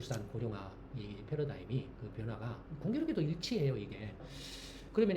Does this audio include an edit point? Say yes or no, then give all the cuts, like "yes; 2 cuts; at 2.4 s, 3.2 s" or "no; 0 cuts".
yes; 1 cut; at 4.3 s